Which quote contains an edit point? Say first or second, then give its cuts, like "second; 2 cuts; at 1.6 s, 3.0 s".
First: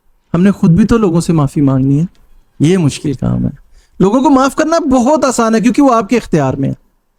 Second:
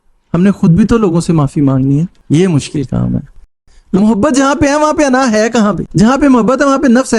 second; 2 cuts; at 2.2 s, 3.5 s